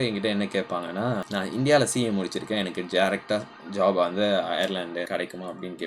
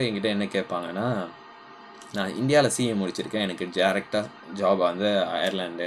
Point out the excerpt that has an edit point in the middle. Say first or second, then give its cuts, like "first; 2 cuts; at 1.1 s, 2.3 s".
first; 2 cuts; at 1.3 s, 5.1 s